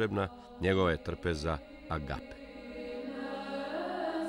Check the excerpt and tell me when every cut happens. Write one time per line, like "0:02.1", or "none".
0:02.3